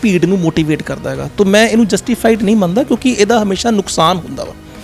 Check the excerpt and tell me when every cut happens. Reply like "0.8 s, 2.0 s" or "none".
none